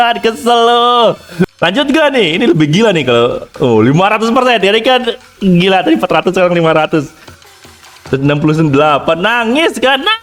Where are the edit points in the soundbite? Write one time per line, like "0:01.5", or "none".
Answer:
0:01.5
0:07.2